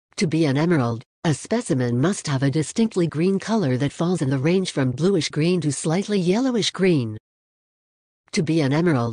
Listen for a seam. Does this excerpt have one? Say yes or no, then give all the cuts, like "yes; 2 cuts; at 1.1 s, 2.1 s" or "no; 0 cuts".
yes; 1 cut; at 1.1 s